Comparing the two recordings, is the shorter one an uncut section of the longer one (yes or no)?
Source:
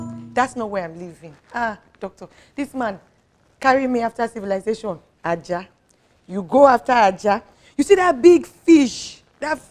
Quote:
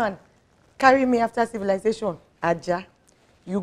yes